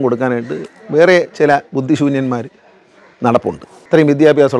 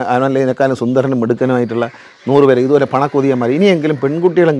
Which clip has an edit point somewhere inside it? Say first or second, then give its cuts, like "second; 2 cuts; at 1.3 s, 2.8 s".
first; 1 cut; at 3.7 s